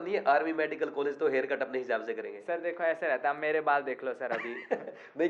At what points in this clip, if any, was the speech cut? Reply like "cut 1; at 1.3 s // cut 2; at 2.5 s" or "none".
none